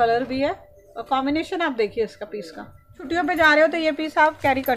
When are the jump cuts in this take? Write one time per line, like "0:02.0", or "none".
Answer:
0:03.0

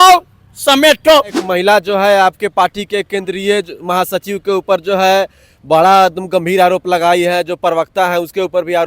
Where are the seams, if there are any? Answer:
0:01.4

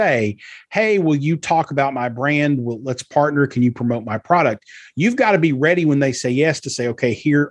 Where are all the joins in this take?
none

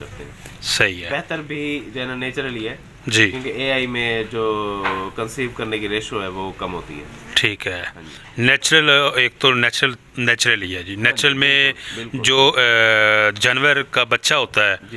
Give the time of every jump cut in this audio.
none

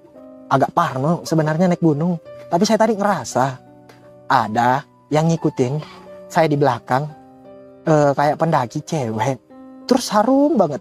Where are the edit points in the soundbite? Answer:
none

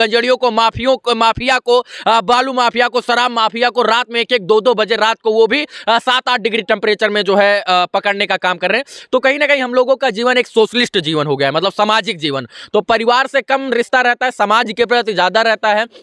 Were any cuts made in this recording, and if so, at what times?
none

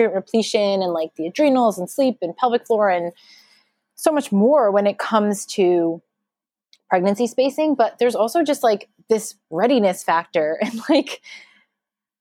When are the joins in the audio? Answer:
none

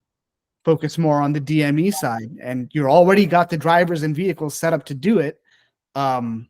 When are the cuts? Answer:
none

